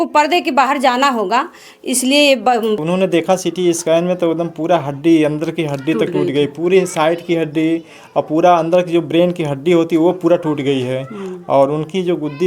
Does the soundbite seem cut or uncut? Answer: cut